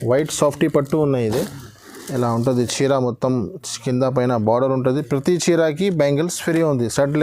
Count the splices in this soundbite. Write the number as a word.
zero